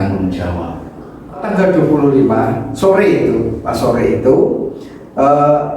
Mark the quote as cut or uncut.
cut